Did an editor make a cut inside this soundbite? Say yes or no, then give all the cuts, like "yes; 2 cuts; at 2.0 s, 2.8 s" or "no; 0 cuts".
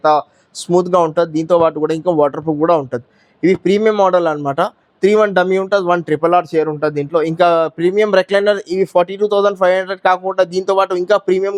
no; 0 cuts